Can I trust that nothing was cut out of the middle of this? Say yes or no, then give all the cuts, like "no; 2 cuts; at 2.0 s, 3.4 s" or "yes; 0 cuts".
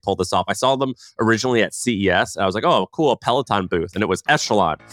yes; 0 cuts